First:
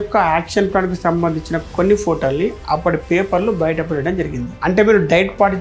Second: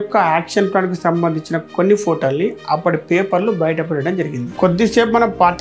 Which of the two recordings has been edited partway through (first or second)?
first